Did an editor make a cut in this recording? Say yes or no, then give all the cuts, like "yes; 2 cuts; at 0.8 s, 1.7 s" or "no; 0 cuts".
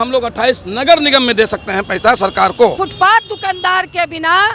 yes; 1 cut; at 2.8 s